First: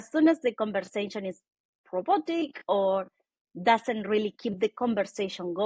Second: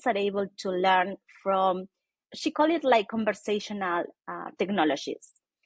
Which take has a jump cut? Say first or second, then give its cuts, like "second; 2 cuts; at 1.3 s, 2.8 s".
second; 1 cut; at 2.2 s